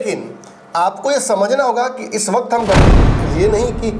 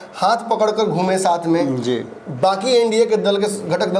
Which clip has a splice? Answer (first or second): first